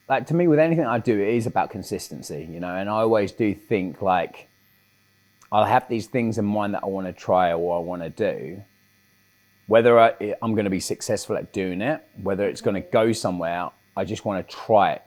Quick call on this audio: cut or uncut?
uncut